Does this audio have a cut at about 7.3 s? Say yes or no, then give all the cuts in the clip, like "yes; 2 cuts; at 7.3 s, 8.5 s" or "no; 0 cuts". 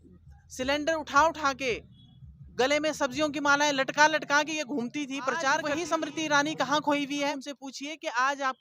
yes; 2 cuts; at 5.8 s, 7.3 s